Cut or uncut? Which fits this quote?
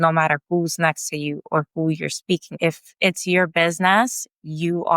cut